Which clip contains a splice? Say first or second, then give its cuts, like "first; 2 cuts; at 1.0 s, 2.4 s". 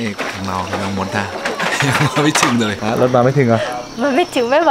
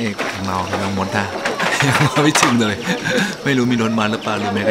first; 1 cut; at 2.8 s